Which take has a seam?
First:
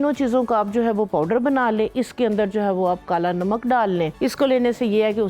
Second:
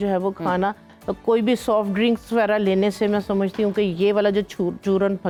first; 1 cut; at 4.1 s

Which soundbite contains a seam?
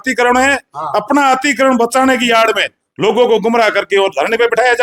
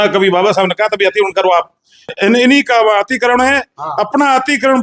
second; 1 cut; at 2.1 s

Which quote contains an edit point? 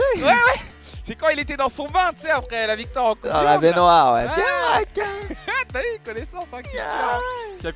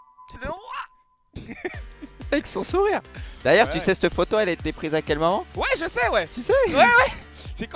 first; 1 cut; at 4.6 s

